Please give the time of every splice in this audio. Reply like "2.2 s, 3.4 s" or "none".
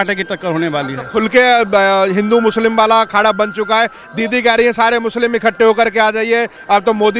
none